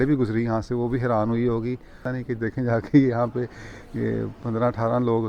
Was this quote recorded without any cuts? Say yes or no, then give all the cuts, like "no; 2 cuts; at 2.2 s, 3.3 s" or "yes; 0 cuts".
no; 1 cut; at 2.1 s